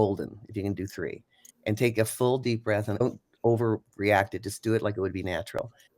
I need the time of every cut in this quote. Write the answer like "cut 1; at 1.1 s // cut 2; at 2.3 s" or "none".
cut 1; at 3.0 s